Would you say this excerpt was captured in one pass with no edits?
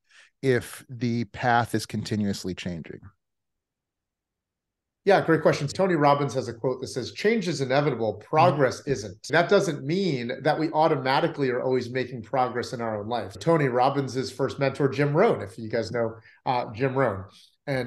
no; 3 cuts; at 5.7 s, 9.2 s, 13.3 s

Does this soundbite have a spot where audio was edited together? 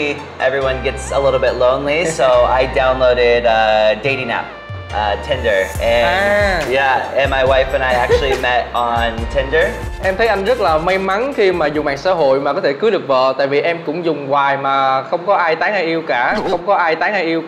yes; 1 cut; at 9.9 s

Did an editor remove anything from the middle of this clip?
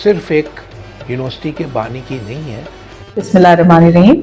yes; 1 cut; at 3.0 s

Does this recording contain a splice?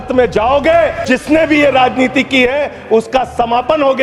yes; 1 cut; at 1.0 s

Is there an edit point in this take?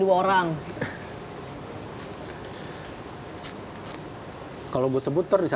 no; 0 cuts

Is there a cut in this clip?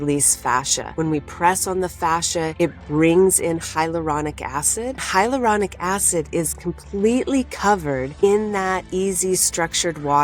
yes; 2 cuts; at 5.0 s, 8.1 s

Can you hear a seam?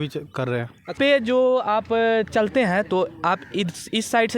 yes; 1 cut; at 0.9 s

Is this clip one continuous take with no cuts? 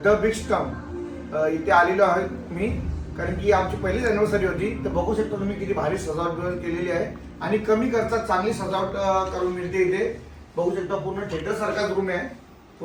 yes; 0 cuts

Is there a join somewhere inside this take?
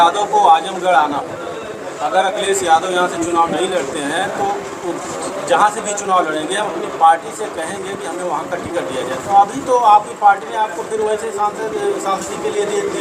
no; 0 cuts

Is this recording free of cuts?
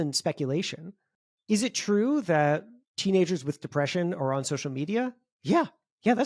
yes; 0 cuts

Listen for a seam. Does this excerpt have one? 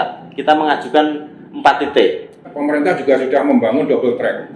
yes; 1 cut; at 2.5 s

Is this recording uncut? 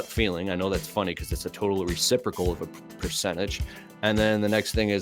yes; 0 cuts

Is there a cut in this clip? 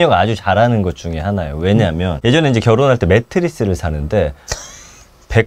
yes; 1 cut; at 2.2 s

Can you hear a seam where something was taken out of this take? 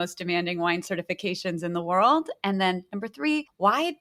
no; 0 cuts

